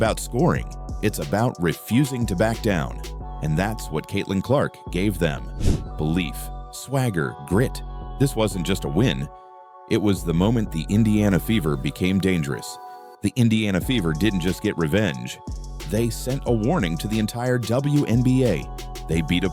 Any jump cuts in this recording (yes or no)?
no